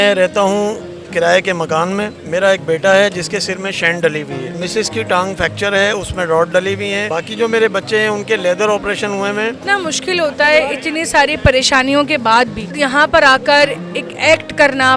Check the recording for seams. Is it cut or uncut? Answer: cut